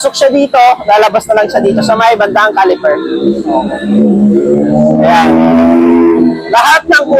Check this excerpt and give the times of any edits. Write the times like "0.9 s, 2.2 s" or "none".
none